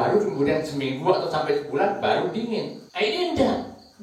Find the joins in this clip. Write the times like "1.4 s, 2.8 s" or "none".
2.8 s